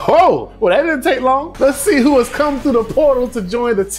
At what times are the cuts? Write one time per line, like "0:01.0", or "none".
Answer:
0:01.5